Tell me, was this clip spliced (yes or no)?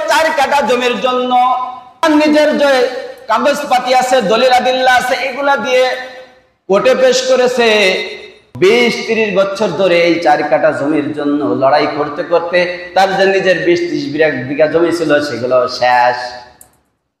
yes